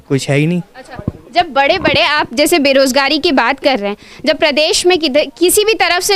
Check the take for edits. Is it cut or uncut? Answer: uncut